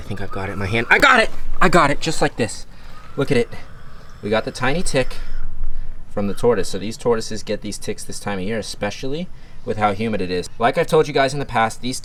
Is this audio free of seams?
yes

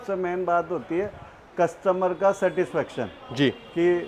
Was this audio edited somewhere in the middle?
no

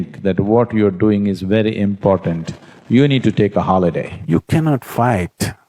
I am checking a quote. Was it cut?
yes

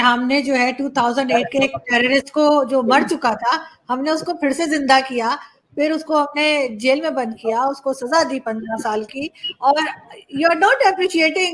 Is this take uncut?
yes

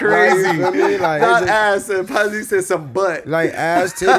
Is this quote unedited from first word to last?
yes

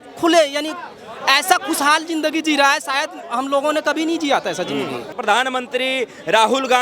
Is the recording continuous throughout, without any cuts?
no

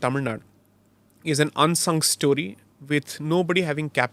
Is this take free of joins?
yes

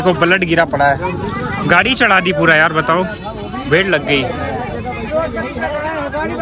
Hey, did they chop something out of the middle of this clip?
no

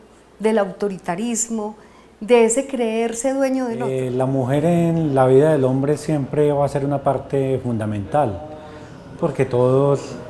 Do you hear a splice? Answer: yes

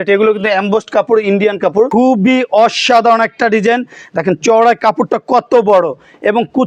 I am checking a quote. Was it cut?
yes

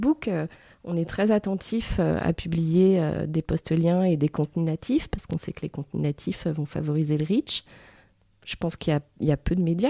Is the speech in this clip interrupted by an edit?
no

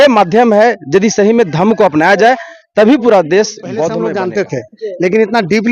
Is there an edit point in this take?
yes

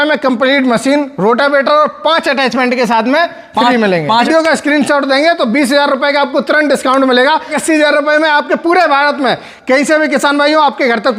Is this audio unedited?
no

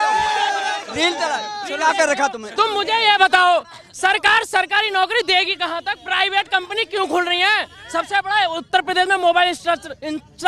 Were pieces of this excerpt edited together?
no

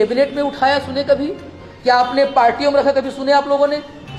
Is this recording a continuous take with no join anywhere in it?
yes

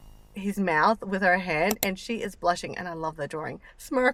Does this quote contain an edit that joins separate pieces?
no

